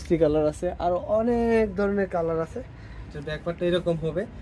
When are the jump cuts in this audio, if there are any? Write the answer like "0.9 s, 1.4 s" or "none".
3.1 s

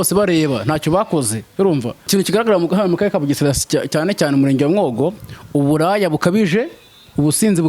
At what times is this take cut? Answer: 2.0 s

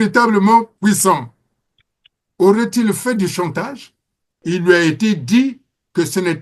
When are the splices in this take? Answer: 4.4 s

